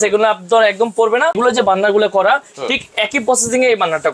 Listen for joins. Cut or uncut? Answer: cut